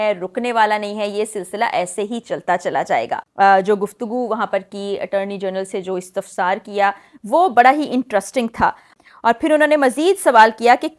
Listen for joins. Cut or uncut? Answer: cut